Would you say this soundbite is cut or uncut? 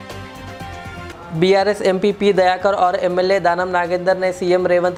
uncut